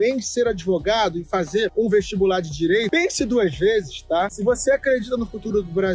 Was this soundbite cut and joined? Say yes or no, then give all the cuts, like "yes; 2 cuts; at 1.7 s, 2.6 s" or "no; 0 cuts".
yes; 1 cut; at 4.3 s